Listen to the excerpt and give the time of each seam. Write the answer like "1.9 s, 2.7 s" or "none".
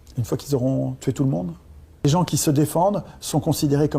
2.0 s